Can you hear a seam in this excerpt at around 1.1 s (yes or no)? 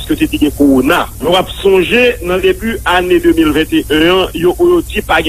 yes